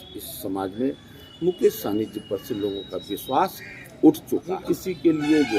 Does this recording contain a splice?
yes; 1 cut; at 4.6 s

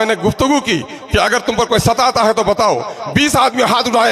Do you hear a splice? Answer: no; 0 cuts

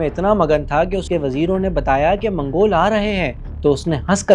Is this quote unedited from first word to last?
no; 1 cut; at 1.0 s

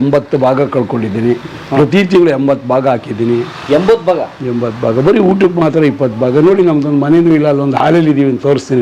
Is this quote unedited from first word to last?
yes; 0 cuts

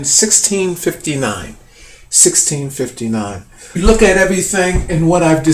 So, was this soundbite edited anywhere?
no; 0 cuts

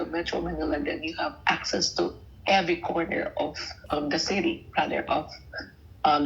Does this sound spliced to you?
no; 0 cuts

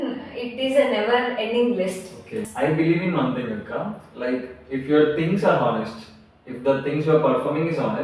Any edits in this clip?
yes; 1 cut; at 2.5 s

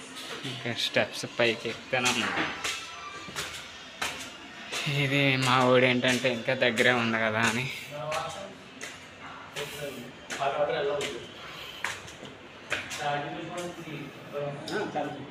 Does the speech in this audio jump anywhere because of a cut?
no; 0 cuts

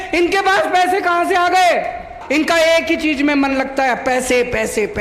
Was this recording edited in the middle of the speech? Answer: yes; 1 cut; at 2.2 s

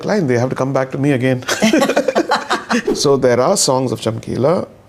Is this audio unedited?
no; 1 cut; at 2.8 s

